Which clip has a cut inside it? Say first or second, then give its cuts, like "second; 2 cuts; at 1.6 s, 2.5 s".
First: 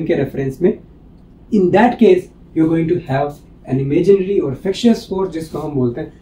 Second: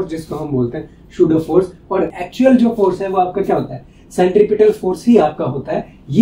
second; 1 cut; at 2.2 s